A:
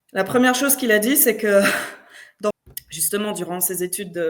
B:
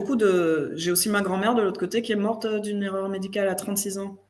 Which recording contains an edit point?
A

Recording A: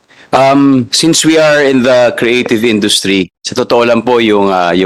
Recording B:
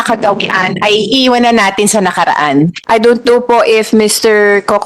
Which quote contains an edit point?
B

